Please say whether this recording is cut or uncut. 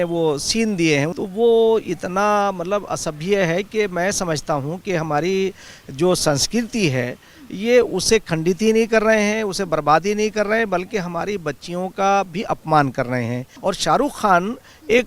cut